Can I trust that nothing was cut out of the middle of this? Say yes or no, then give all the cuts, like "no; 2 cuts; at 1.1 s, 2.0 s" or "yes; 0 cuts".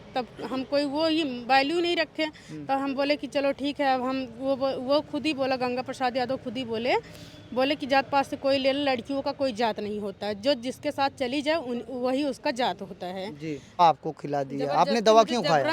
no; 1 cut; at 13.8 s